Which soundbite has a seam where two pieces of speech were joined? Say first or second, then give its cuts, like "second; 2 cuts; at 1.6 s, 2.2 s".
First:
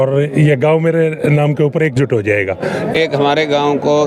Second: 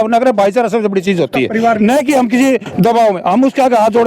first; 1 cut; at 2.9 s